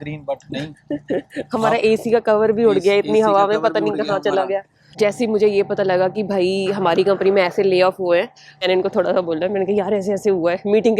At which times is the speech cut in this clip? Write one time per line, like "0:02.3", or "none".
0:04.8
0:08.6